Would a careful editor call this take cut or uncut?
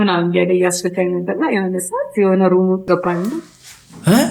cut